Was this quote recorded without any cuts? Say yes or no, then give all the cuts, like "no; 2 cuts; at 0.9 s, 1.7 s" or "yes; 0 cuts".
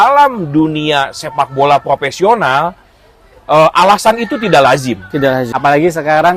no; 1 cut; at 5.5 s